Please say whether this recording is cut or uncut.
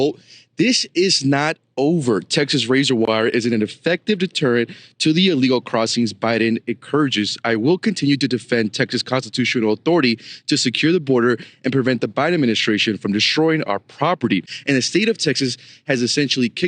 cut